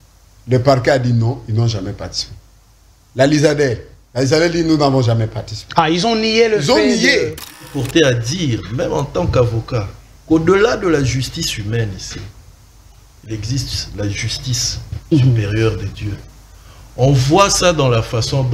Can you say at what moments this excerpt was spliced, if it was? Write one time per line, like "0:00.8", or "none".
0:07.7